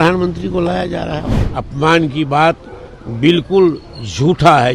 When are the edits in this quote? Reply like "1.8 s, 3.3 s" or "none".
1.3 s